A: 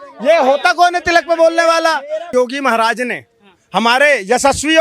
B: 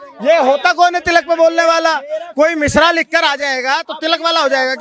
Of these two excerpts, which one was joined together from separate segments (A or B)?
A